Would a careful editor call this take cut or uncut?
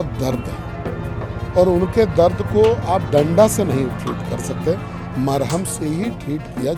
uncut